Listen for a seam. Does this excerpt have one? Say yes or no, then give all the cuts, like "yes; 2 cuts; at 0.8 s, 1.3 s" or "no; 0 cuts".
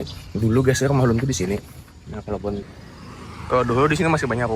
yes; 1 cut; at 2.7 s